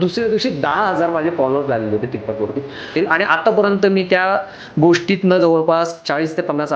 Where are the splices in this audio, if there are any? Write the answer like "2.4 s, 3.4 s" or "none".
2.9 s